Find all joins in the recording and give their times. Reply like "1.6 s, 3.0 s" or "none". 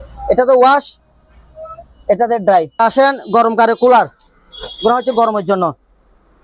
2.8 s